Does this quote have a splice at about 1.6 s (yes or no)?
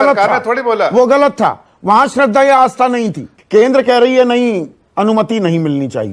no